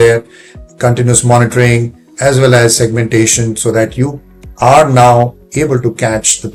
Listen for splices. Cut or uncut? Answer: uncut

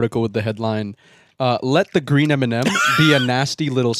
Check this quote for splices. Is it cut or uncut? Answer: uncut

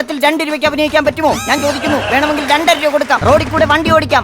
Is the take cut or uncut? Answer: cut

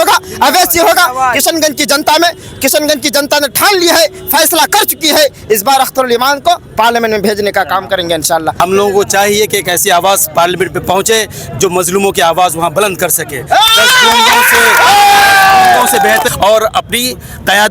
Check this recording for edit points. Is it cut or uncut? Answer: cut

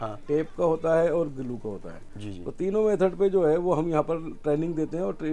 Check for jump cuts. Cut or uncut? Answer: uncut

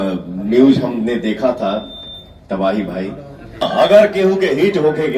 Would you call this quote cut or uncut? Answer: cut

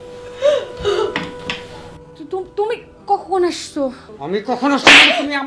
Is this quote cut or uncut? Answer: cut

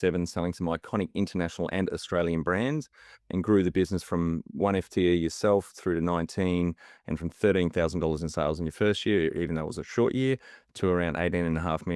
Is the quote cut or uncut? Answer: uncut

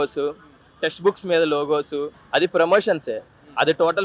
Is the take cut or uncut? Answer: cut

